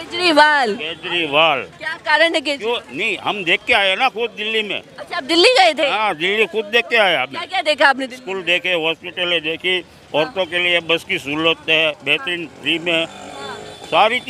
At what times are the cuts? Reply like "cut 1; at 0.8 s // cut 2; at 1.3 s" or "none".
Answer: none